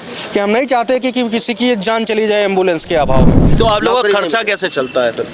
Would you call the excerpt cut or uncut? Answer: cut